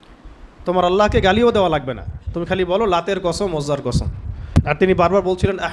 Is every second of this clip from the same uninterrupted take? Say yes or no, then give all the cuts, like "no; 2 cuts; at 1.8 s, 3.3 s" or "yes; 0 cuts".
no; 1 cut; at 4.7 s